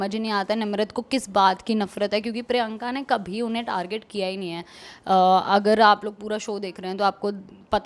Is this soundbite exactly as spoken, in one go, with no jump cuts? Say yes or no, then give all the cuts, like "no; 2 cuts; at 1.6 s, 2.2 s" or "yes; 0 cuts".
yes; 0 cuts